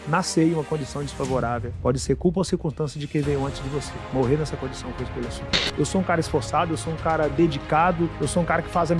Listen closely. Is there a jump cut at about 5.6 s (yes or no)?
yes